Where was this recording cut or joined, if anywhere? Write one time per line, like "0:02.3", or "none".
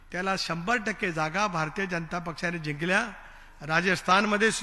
none